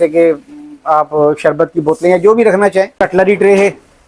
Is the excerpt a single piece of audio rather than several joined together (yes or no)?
no